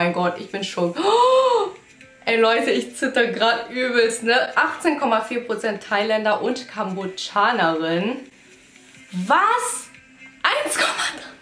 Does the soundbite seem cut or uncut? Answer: uncut